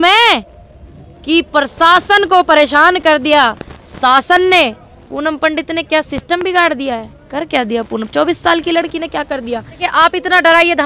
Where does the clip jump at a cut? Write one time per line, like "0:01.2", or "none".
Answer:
0:09.8